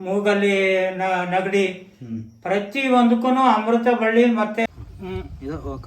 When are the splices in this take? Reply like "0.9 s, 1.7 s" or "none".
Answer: 4.7 s